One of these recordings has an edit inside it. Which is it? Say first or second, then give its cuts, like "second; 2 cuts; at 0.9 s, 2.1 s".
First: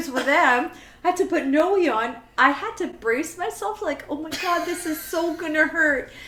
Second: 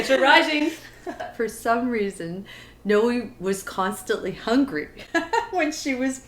second; 1 cut; at 1.2 s